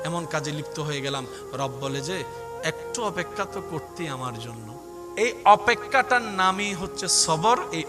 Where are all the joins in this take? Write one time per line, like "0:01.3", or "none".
0:05.0